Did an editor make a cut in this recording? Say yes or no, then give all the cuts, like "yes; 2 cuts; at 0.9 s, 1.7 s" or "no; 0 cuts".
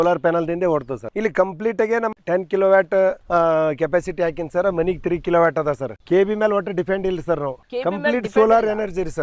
yes; 1 cut; at 2.2 s